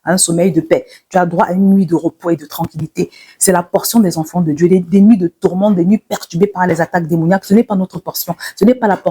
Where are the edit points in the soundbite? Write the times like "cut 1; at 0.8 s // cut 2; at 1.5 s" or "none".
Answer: none

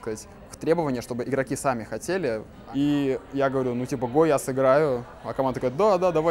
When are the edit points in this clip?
cut 1; at 2.5 s

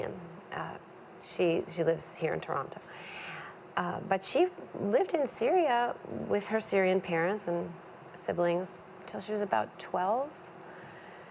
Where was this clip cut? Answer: cut 1; at 1.5 s

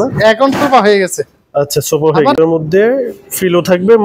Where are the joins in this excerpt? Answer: cut 1; at 2.4 s

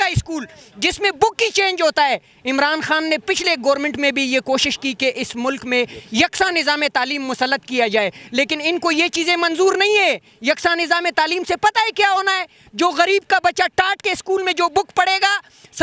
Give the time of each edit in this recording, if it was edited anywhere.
none

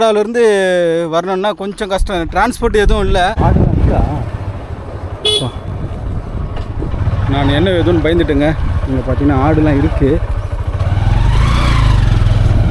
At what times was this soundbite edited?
cut 1; at 3.4 s

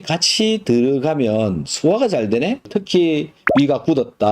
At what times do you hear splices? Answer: cut 1; at 2.6 s

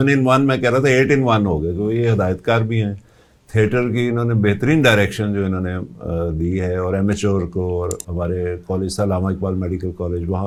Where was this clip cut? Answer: none

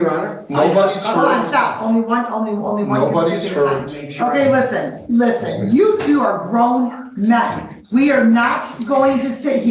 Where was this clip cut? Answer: cut 1; at 4.1 s

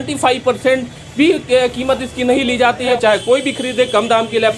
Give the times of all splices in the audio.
cut 1; at 2.9 s

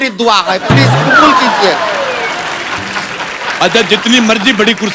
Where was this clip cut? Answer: cut 1; at 3.4 s

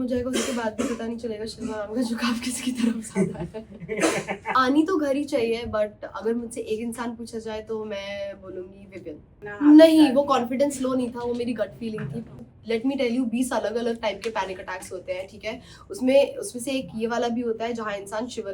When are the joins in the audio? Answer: cut 1; at 4.5 s // cut 2; at 9.4 s // cut 3; at 12.4 s

